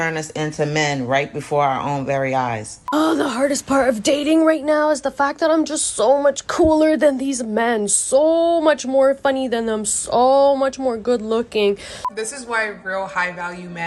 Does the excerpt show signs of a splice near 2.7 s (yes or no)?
yes